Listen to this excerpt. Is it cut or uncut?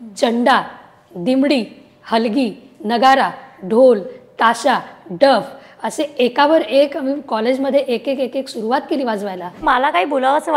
cut